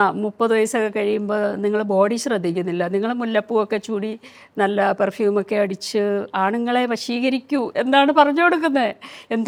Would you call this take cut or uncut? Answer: uncut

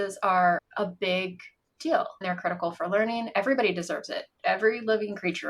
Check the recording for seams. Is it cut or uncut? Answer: cut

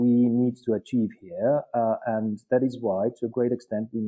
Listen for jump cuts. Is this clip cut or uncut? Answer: uncut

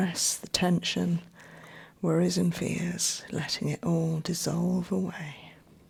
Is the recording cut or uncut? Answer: uncut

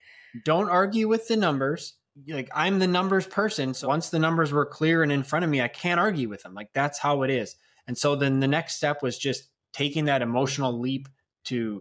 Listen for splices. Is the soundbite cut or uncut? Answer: cut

